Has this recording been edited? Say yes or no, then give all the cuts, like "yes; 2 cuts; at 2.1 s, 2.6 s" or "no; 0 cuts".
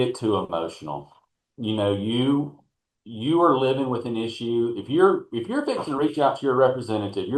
no; 0 cuts